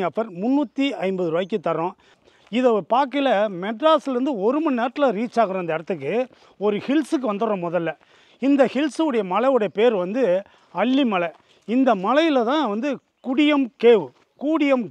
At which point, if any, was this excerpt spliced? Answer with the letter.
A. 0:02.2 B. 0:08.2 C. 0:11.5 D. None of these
A